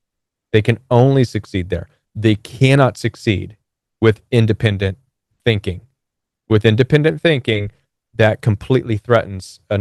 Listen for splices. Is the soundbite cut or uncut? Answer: uncut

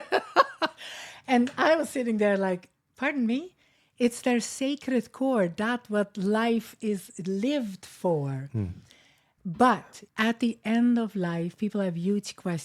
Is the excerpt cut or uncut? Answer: cut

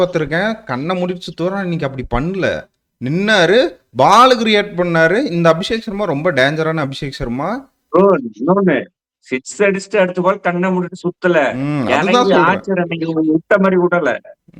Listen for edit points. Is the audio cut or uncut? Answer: uncut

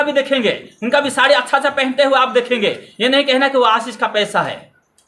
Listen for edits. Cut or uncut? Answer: uncut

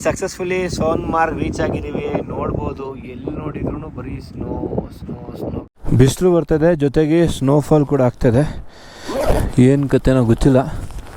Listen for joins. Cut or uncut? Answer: cut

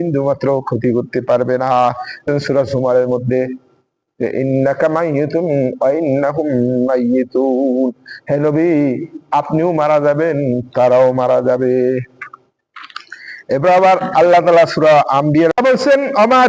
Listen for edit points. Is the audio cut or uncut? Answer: cut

